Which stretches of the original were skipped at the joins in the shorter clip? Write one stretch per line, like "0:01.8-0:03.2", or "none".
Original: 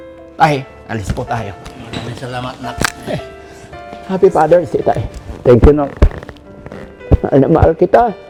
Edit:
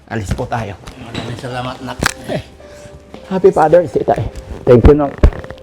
none